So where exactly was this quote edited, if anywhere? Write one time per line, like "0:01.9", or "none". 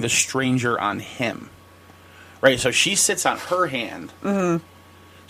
none